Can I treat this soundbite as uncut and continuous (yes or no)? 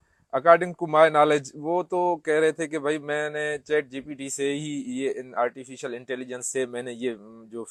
yes